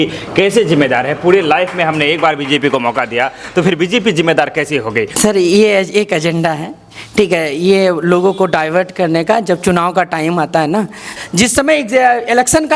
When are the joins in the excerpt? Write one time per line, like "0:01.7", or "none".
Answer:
0:05.1
0:11.1